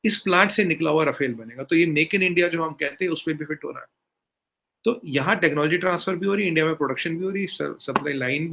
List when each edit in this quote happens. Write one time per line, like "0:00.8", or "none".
none